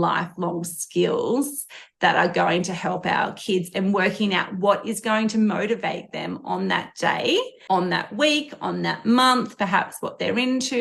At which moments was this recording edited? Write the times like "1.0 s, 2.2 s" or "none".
7.5 s